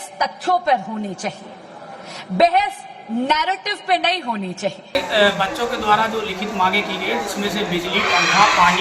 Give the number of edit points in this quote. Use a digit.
1